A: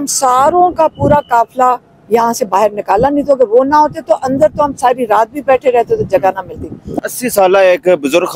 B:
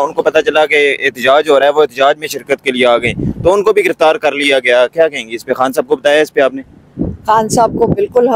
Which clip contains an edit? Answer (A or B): A